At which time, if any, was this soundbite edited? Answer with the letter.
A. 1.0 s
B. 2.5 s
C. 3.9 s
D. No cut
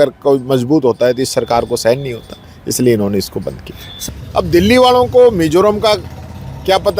C